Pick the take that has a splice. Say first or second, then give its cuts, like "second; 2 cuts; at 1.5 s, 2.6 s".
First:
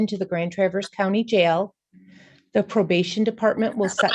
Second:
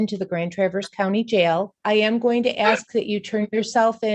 second; 1 cut; at 1.8 s